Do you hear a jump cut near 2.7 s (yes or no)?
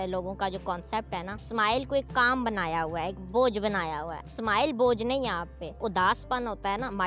no